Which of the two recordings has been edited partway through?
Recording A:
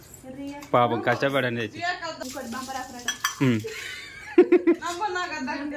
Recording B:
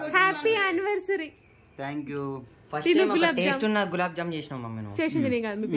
A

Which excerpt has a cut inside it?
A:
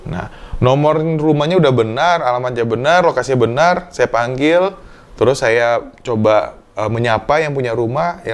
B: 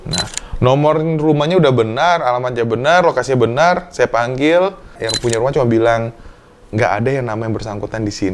B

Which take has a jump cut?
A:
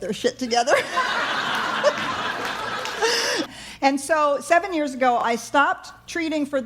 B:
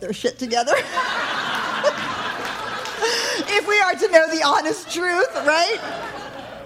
A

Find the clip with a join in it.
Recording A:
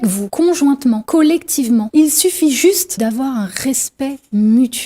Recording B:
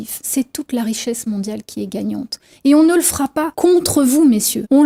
A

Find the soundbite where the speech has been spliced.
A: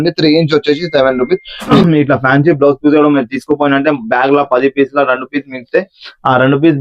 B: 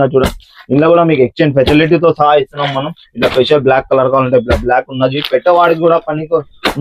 A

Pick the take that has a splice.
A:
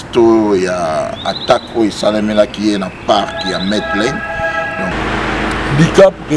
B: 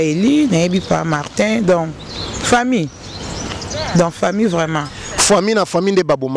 A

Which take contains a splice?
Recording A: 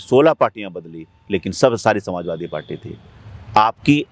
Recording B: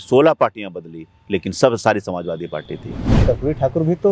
B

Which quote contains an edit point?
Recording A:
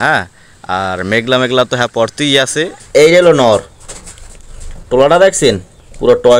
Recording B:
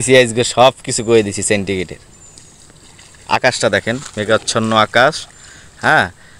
A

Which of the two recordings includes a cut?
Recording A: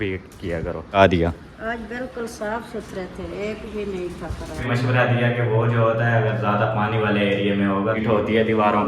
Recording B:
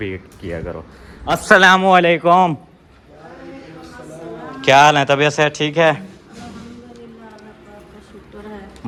A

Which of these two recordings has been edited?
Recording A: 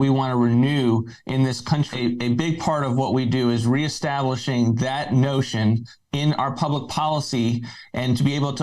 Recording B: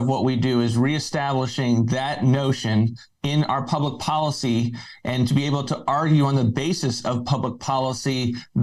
A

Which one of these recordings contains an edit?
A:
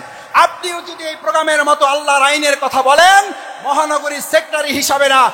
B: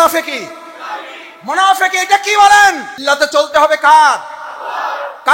B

